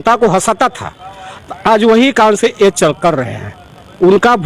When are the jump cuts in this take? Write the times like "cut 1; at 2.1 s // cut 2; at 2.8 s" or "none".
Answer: none